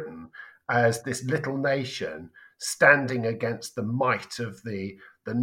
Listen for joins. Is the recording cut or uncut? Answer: uncut